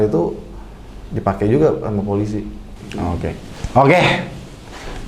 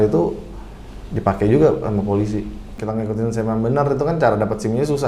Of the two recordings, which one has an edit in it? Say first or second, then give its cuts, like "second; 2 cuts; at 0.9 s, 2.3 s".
second; 1 cut; at 2.8 s